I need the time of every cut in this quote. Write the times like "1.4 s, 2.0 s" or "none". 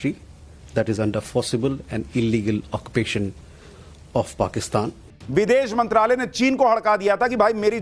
5.0 s